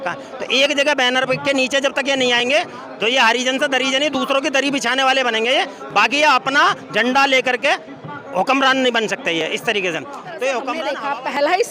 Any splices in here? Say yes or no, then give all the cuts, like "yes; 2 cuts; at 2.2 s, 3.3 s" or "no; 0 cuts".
yes; 1 cut; at 10.8 s